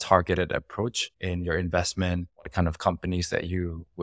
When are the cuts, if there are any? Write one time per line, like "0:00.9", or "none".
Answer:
none

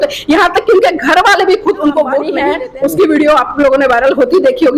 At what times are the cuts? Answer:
0:02.4

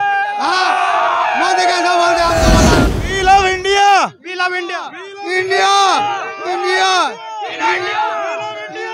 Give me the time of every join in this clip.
0:02.9

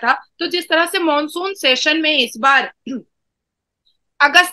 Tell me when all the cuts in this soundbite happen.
none

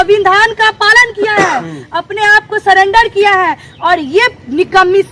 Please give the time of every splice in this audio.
none

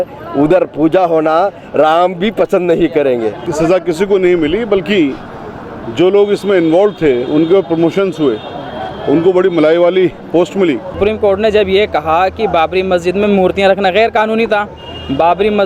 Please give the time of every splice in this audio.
0:03.4
0:11.0

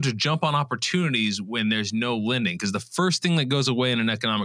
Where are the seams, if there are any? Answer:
none

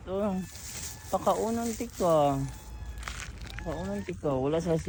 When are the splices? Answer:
none

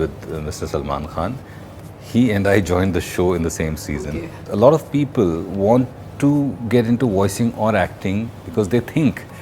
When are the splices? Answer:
0:04.4

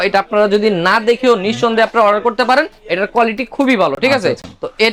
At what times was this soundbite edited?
none

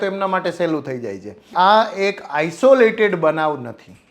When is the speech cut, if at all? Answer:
0:01.5

